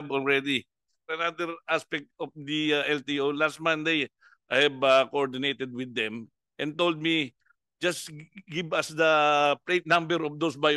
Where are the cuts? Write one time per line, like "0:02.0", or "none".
0:01.1